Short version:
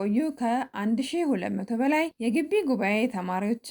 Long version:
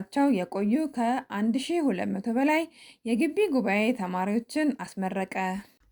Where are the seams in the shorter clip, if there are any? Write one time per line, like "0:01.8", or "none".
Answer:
0:02.1